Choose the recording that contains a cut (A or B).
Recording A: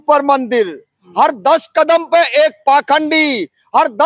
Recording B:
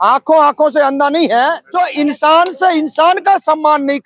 B